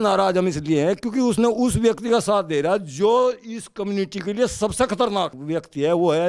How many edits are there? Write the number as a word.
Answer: one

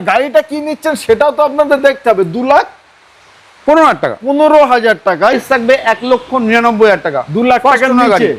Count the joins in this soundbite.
one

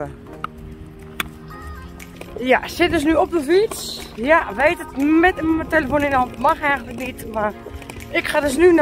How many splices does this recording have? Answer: one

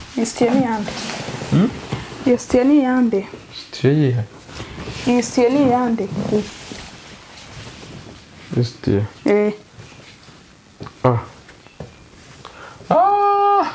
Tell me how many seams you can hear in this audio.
zero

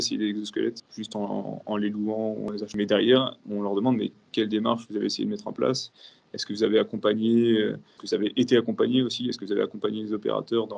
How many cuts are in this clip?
three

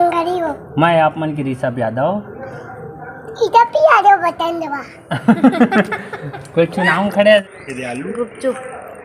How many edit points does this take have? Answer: one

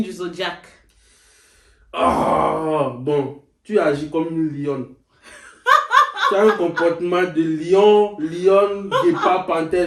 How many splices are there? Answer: zero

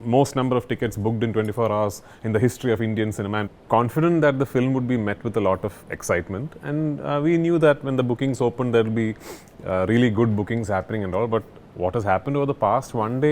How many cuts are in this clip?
one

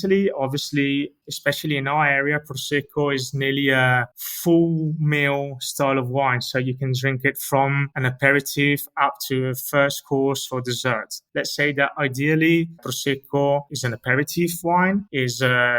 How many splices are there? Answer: one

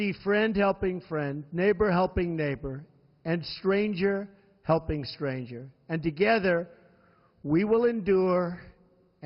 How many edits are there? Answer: one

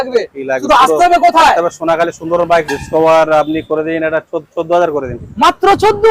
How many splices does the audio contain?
one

